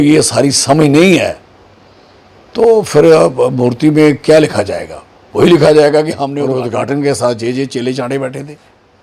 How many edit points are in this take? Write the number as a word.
one